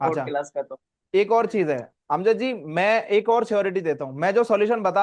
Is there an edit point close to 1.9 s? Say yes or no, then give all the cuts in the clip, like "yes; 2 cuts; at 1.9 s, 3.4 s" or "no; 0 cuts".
no; 0 cuts